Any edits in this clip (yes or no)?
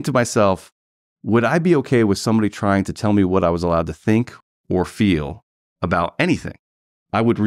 no